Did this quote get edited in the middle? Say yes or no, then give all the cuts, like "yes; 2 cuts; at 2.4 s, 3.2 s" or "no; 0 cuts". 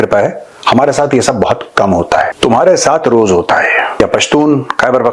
yes; 2 cuts; at 2.3 s, 4.0 s